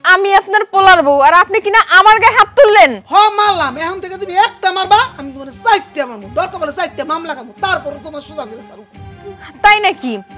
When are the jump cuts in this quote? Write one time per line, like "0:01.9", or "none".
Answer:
none